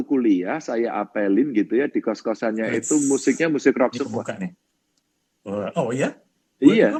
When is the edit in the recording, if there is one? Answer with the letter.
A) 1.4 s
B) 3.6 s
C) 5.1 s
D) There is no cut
D